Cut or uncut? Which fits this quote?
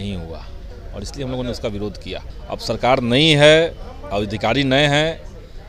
cut